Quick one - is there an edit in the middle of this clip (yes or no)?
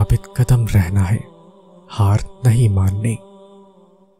yes